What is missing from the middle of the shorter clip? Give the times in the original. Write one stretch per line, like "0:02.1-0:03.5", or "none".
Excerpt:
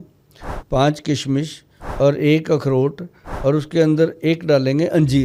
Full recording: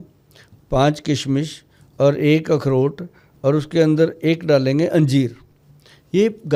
none